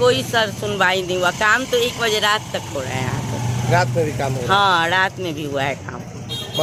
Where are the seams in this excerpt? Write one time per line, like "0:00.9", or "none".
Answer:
none